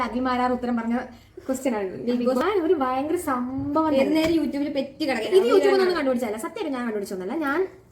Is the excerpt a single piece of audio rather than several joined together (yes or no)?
no